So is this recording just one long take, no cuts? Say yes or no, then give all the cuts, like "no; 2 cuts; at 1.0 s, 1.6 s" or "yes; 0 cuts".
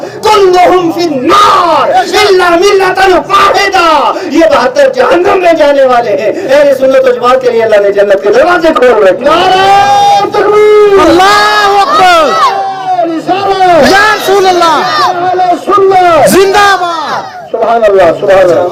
yes; 0 cuts